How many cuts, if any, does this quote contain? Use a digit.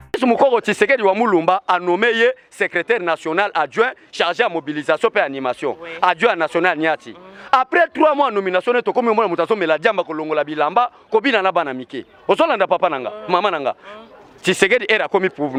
0